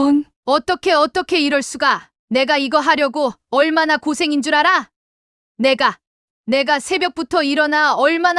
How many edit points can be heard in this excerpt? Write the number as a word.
one